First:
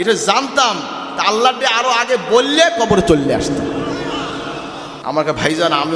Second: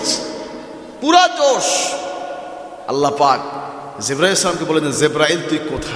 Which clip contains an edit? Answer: first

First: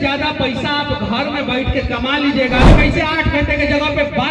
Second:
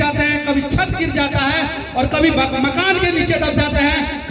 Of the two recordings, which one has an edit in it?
first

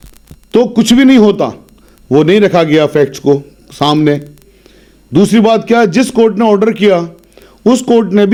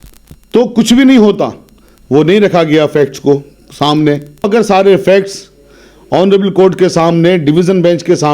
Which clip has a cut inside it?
second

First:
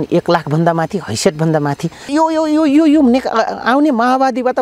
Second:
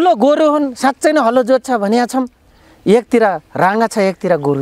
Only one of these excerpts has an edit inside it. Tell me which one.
first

